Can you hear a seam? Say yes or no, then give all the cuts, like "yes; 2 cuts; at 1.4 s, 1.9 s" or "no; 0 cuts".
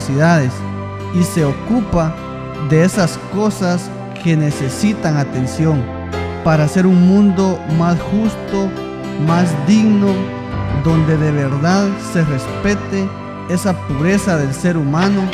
yes; 1 cut; at 5.3 s